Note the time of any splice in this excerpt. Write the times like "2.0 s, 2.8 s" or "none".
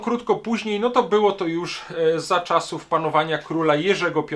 none